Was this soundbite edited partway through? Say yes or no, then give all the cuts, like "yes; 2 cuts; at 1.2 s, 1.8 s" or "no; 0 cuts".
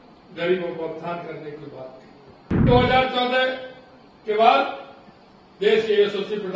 yes; 1 cut; at 2.7 s